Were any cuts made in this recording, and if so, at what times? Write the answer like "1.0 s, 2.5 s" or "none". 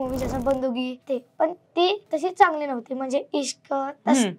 1.0 s, 2.0 s